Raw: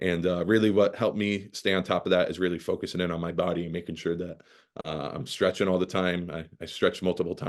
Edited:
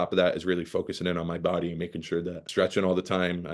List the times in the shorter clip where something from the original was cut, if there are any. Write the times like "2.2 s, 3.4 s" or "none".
2.4 s